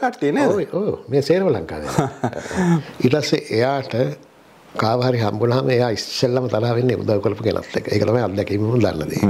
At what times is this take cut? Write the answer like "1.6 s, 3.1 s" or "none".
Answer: 2.8 s